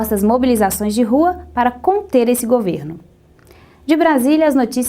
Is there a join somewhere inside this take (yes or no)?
yes